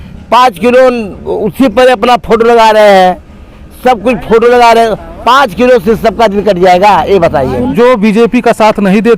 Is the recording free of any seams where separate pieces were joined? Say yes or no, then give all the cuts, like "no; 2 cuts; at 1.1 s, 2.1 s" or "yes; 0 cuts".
no; 1 cut; at 7.7 s